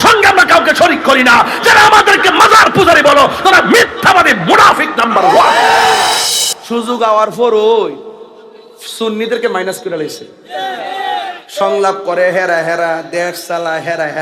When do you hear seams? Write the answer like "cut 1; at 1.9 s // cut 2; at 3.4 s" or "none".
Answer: cut 1; at 6.1 s